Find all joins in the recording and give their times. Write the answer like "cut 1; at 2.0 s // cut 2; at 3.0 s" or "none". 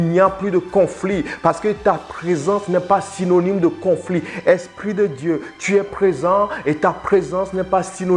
none